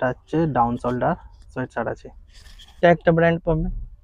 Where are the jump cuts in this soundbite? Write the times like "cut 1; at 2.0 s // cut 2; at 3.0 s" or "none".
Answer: cut 1; at 2.8 s